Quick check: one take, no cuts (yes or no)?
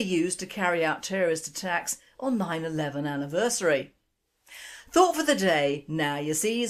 no